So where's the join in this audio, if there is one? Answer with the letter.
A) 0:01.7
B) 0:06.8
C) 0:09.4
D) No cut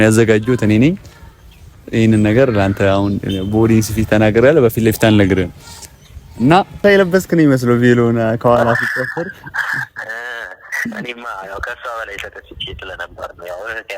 B